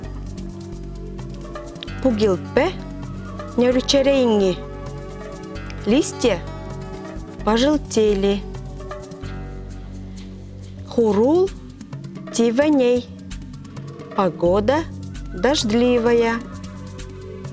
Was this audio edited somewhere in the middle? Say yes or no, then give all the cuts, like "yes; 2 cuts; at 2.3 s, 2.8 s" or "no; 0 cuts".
yes; 3 cuts; at 8.4 s, 10.6 s, 16.4 s